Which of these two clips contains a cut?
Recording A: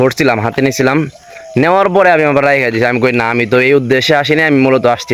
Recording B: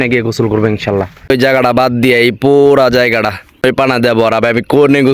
B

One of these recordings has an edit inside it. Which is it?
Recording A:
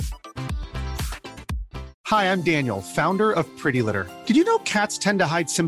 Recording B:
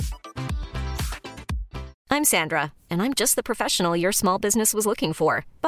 B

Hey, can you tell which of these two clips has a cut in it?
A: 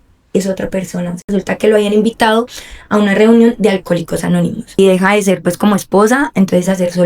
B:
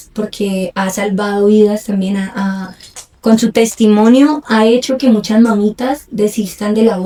A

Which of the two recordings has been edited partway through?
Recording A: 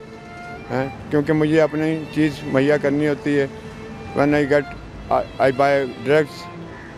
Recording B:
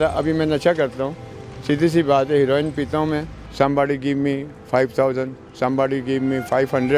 B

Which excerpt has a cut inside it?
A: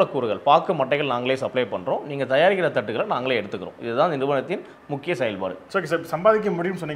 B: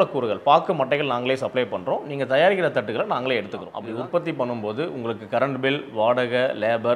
B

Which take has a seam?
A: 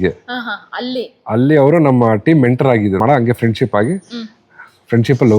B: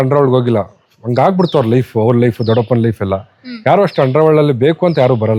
A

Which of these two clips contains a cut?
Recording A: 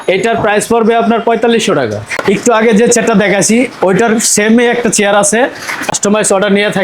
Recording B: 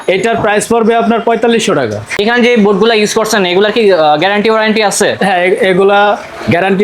A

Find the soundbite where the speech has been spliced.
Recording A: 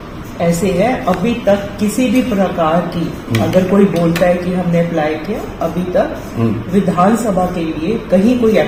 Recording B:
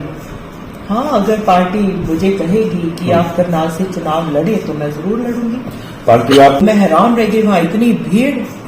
B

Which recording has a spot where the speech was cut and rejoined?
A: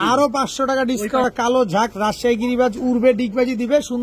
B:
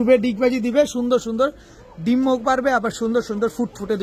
A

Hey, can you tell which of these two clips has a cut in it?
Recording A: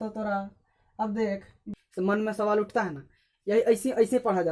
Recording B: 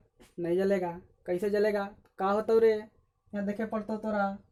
A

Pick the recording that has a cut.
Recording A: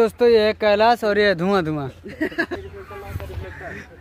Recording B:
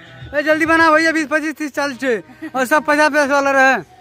A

